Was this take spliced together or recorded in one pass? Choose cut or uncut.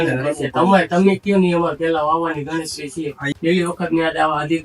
cut